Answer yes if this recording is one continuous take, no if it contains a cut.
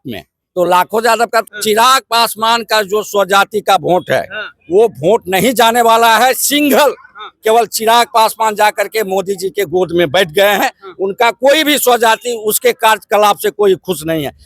no